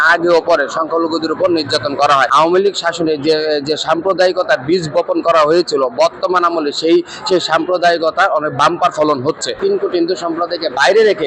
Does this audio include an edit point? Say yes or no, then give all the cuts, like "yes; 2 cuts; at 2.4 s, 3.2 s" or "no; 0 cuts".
yes; 2 cuts; at 2.3 s, 9.6 s